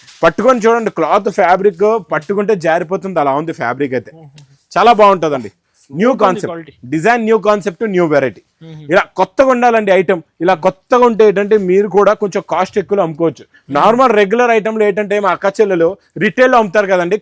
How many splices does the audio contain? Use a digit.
0